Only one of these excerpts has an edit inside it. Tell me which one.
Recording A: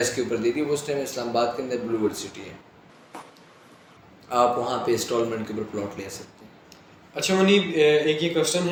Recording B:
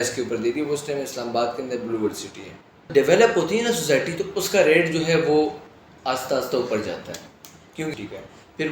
B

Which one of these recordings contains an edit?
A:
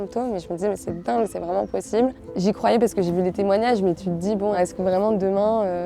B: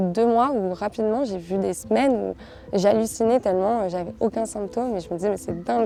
A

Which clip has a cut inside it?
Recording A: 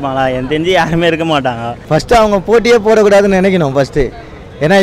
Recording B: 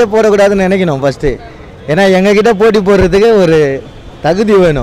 A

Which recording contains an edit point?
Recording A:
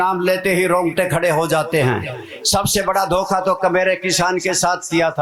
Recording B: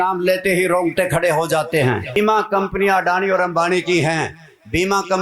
B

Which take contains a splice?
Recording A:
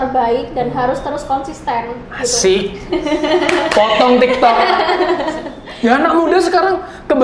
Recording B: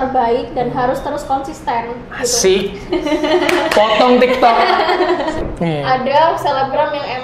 B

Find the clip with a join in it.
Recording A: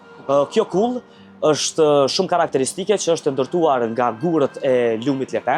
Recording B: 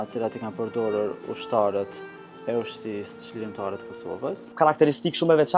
B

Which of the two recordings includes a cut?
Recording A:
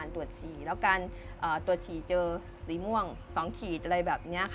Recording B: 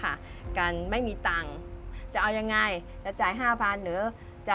B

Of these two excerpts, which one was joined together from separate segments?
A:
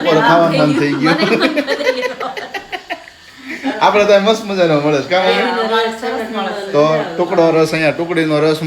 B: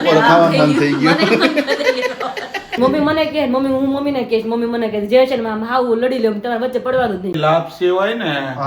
B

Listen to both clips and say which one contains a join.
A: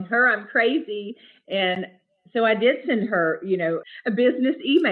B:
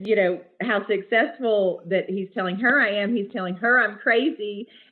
A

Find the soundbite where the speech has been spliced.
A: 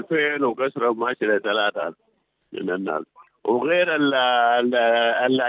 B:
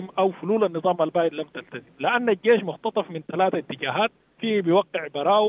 B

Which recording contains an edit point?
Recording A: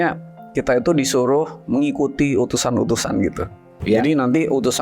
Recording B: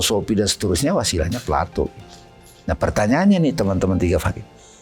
A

